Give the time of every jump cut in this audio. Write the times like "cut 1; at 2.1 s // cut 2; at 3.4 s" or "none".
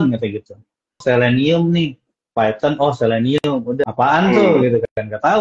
cut 1; at 1.0 s // cut 2; at 3.8 s